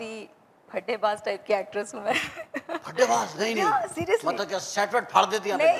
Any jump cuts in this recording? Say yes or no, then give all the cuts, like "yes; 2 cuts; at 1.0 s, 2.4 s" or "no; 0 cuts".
no; 0 cuts